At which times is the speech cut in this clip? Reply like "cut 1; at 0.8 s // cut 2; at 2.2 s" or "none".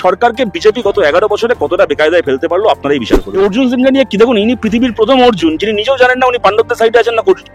cut 1; at 3.2 s